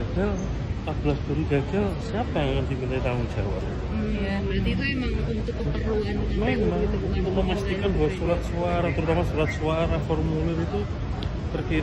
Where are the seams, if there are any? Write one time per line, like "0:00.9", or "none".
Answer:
none